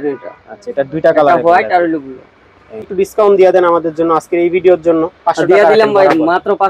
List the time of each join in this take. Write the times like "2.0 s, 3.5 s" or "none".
2.9 s